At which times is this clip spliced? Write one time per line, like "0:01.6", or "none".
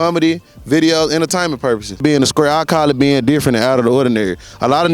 0:02.0